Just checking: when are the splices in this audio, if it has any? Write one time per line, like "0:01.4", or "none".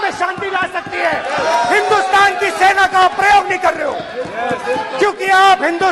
none